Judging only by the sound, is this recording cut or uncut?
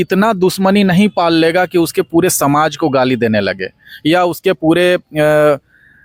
uncut